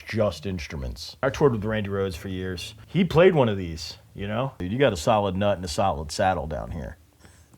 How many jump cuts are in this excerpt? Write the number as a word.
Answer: two